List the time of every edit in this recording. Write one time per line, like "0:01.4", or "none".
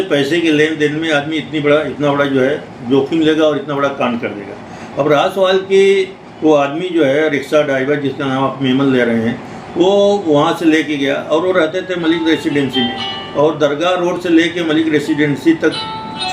none